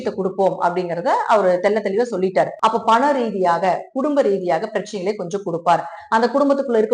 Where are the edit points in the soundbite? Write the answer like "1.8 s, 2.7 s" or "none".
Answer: 2.5 s